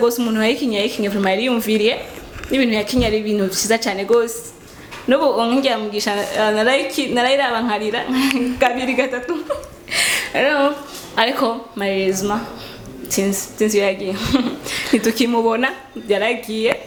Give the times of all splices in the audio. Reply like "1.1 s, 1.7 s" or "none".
none